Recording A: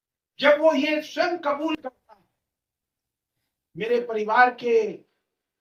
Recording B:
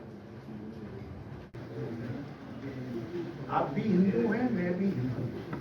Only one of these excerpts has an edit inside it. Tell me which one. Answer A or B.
B